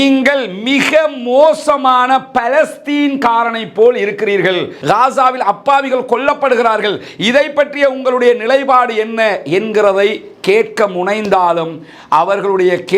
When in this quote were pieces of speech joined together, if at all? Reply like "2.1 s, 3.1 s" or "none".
4.7 s